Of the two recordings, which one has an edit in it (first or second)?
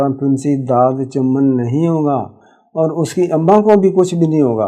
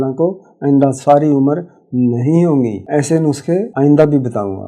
second